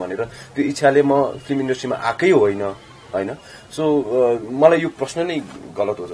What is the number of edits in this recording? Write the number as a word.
zero